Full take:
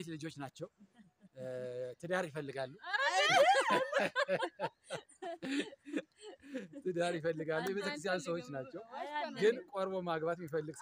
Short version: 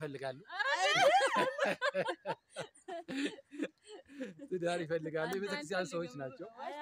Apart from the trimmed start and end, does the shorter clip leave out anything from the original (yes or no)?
no